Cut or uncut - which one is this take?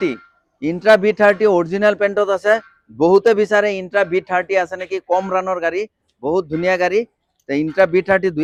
uncut